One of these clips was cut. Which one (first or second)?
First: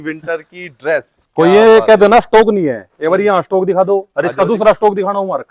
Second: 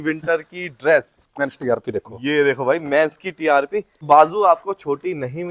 second